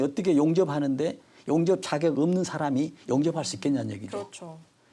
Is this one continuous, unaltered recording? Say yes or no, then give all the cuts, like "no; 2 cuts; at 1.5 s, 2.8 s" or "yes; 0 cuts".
yes; 0 cuts